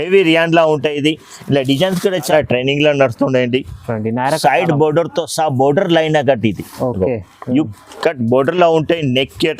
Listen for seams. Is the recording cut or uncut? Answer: cut